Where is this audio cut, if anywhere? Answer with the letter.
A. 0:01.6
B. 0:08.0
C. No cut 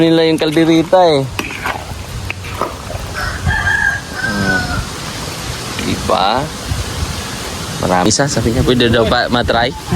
B